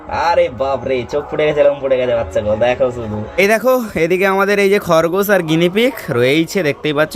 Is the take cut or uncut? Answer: cut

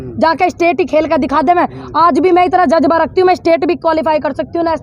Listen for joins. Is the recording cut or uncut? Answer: uncut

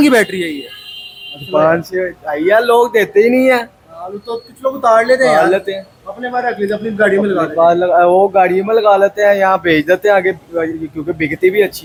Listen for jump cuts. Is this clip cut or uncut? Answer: uncut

